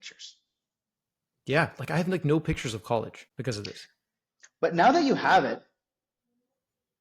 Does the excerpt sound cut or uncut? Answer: cut